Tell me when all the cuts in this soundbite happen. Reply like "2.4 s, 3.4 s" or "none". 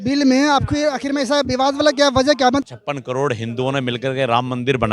2.7 s